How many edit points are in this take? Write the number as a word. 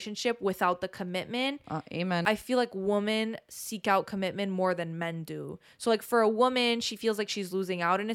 one